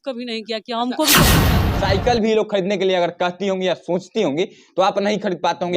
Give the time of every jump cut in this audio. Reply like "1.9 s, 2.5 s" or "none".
1.4 s